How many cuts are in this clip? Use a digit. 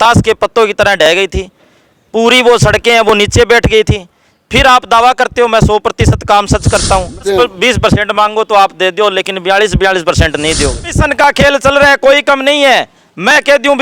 2